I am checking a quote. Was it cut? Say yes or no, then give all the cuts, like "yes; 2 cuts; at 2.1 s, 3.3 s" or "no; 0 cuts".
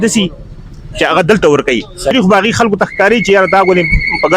yes; 1 cut; at 2.1 s